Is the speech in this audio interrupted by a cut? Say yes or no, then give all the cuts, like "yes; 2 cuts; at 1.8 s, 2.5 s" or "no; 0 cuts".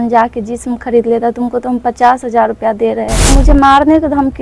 yes; 1 cut; at 3.3 s